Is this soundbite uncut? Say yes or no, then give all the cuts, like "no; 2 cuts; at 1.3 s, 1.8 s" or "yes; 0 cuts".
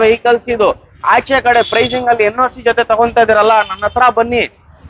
yes; 0 cuts